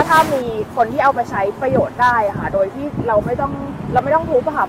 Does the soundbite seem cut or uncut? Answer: uncut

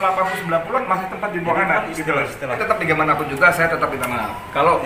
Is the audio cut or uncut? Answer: cut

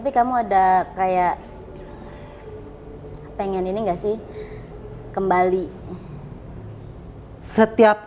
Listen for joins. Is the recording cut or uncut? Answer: uncut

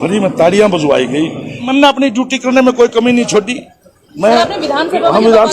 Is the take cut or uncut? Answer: cut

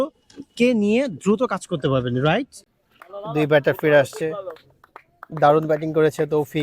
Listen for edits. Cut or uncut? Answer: cut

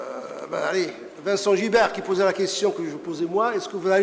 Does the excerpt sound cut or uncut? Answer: uncut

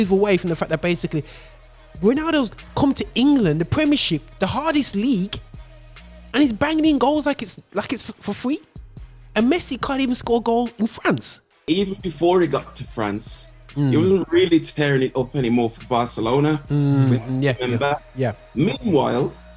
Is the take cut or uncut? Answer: cut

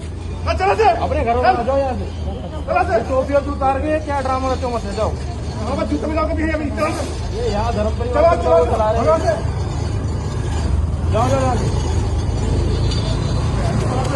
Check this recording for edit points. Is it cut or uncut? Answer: uncut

